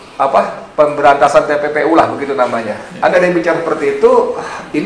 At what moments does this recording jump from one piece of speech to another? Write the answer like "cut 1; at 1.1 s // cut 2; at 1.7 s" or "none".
cut 1; at 3.1 s